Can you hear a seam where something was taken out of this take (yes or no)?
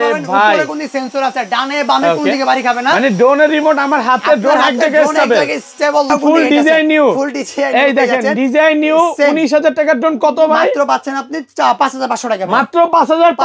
yes